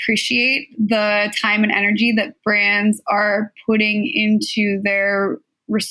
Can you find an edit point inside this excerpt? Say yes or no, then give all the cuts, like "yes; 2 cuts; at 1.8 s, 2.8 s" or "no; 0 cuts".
no; 0 cuts